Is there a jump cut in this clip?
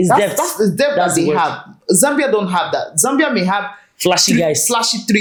no; 0 cuts

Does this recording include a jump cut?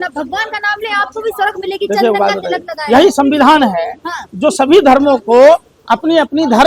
no; 0 cuts

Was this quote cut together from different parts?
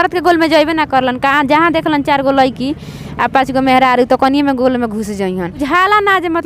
no; 0 cuts

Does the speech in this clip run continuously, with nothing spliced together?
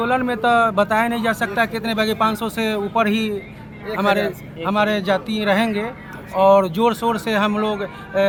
yes; 0 cuts

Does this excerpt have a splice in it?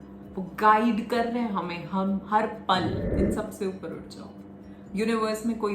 yes; 1 cut; at 3.1 s

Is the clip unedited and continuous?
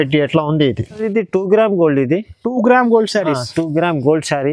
no; 1 cut; at 1.0 s

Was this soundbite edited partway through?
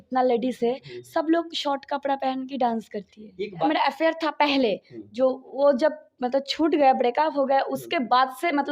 yes; 1 cut; at 3.7 s

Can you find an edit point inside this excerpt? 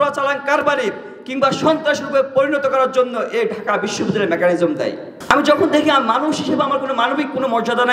yes; 1 cut; at 5.1 s

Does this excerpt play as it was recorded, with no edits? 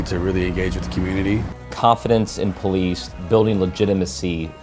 no; 2 cuts; at 1.5 s, 3.1 s

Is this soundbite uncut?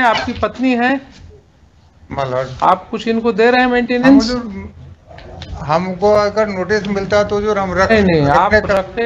yes; 0 cuts

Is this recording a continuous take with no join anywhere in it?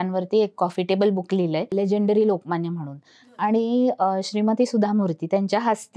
yes; 0 cuts

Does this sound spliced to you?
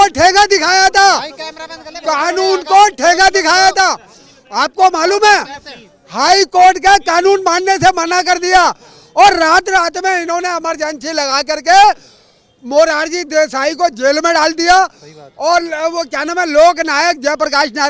no; 0 cuts

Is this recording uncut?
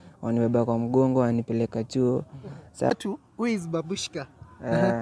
no; 1 cut; at 2.9 s

